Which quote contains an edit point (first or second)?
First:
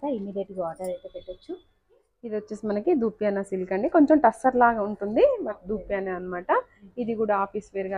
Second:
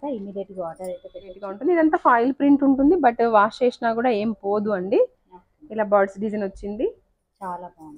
second